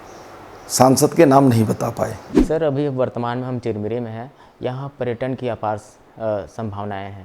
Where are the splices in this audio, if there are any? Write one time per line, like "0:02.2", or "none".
0:02.3